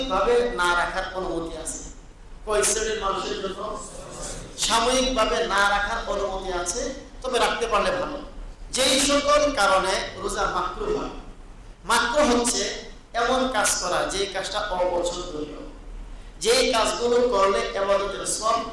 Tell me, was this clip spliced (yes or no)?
yes